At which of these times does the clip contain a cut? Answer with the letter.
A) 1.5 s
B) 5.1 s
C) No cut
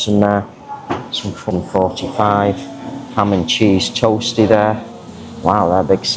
A